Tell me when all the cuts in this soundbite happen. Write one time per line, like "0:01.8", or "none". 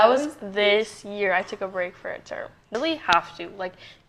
0:02.7